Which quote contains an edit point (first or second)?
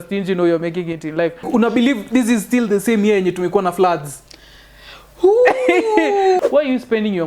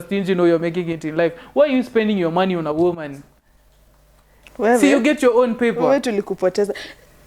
first